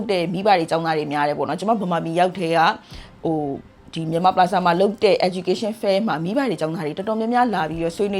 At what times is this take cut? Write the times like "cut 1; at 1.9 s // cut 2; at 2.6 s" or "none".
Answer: none